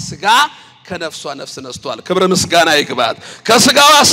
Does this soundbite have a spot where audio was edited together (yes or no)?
no